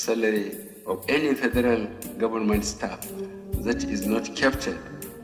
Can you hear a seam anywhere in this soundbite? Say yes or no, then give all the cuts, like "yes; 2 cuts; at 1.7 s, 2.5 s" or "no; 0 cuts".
no; 0 cuts